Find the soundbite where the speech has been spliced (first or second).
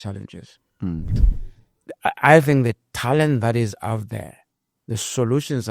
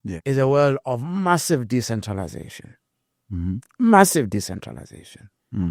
first